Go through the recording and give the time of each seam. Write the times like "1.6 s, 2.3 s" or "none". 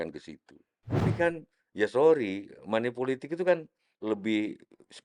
1.1 s, 3.9 s